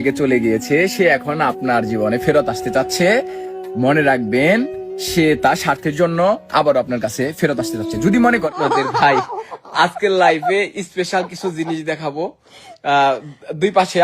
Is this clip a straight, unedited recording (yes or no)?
no